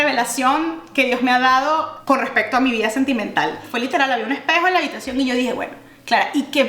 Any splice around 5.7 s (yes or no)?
no